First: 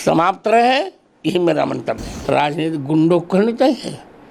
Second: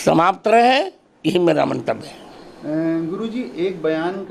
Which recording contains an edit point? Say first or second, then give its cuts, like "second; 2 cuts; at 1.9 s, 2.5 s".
first; 1 cut; at 2.1 s